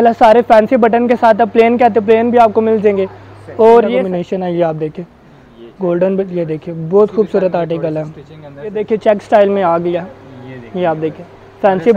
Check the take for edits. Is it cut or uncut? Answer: cut